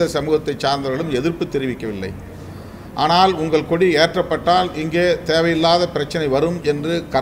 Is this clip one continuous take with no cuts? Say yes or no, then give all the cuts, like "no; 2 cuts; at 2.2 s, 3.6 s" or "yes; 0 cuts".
yes; 0 cuts